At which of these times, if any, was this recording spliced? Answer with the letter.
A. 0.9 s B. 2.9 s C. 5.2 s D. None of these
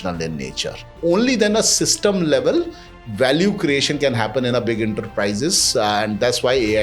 A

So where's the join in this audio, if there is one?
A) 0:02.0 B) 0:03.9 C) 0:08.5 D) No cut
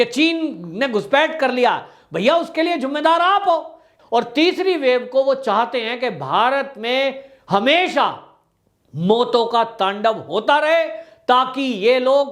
B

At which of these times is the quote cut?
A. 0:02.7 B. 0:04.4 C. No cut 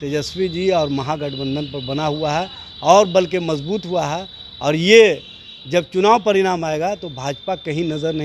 C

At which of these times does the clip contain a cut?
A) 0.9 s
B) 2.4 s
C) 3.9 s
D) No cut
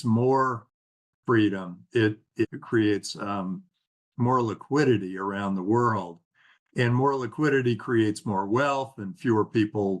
B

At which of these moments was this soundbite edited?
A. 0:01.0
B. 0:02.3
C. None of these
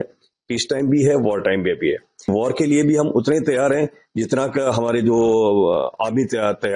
B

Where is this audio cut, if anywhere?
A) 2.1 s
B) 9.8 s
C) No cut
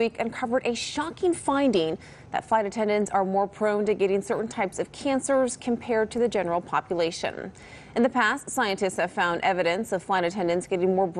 C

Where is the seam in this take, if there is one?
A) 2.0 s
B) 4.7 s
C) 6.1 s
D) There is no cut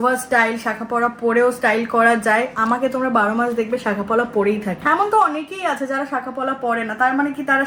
B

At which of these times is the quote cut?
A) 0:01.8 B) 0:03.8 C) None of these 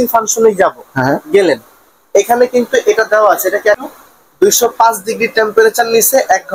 B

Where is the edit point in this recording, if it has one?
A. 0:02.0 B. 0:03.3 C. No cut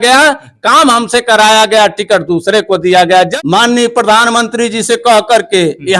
B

